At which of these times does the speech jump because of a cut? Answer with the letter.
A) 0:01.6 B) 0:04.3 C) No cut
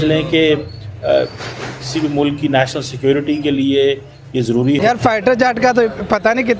B